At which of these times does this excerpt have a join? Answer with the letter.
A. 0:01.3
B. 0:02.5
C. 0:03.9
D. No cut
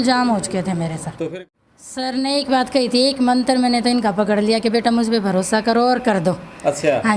A